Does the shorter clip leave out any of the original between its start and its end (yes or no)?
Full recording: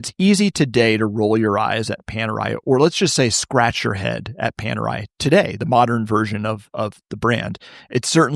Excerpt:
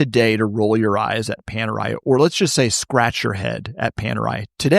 no